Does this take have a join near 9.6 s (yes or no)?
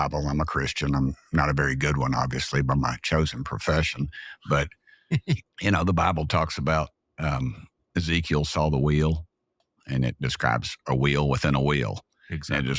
yes